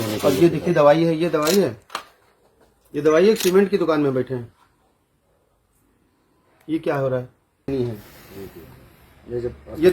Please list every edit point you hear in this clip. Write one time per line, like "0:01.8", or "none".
0:07.7